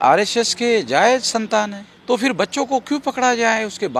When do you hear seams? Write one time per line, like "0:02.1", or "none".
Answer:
0:01.9